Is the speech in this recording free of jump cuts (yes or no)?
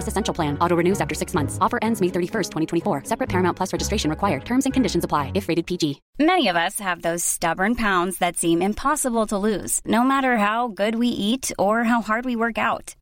no